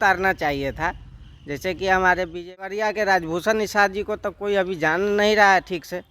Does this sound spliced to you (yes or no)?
yes